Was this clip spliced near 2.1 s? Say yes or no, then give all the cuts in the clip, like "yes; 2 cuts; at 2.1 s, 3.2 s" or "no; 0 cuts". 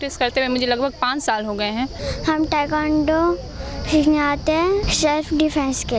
yes; 2 cuts; at 2.1 s, 4.9 s